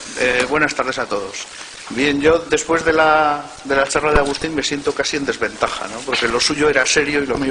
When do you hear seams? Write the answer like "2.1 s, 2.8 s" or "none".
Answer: none